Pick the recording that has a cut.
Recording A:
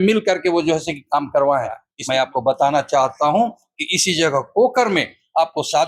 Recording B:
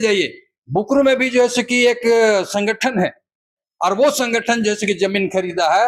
A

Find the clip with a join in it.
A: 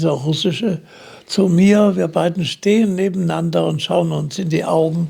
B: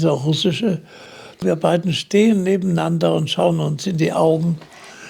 B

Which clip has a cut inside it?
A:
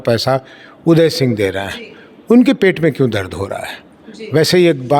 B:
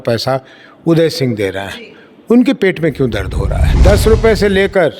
B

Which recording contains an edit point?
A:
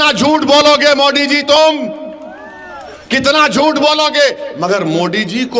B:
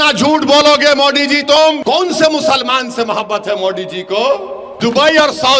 B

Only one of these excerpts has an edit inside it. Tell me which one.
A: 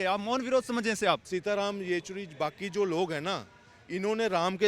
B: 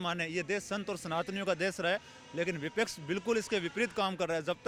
A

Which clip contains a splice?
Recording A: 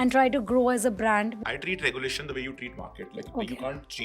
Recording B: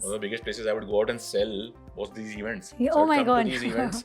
A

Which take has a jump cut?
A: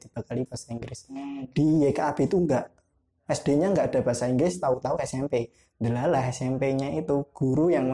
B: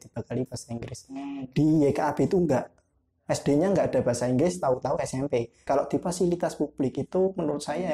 B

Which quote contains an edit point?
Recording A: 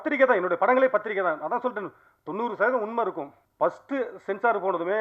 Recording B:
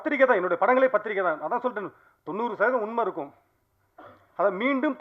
A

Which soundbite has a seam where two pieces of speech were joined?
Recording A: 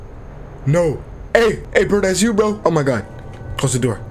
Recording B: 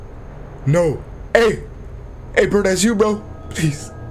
A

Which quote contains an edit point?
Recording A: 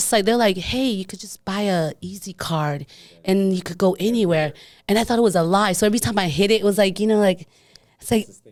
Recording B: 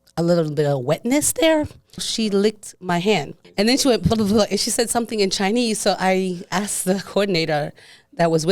B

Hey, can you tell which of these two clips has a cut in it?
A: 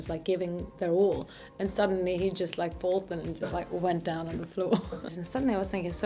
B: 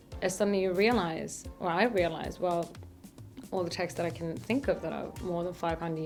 A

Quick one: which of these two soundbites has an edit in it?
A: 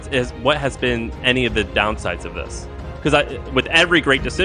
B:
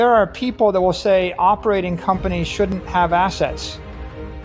B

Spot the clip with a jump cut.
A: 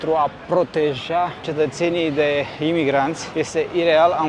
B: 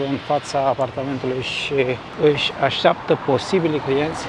A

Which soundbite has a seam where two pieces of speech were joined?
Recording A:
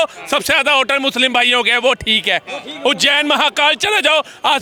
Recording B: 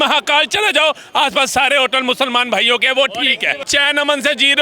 B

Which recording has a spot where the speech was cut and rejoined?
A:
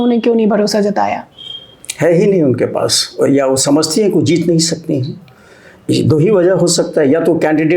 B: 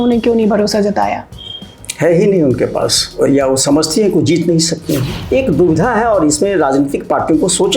B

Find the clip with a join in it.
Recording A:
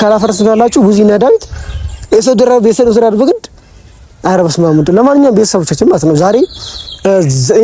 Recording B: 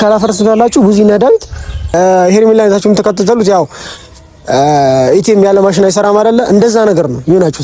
B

